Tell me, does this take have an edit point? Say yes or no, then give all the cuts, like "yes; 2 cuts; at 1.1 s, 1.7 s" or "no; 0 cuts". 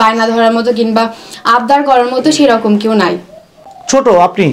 no; 0 cuts